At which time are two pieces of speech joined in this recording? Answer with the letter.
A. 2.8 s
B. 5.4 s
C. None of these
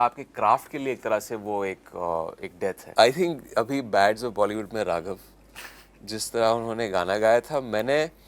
A